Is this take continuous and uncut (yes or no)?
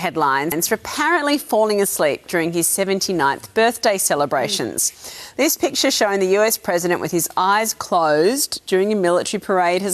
yes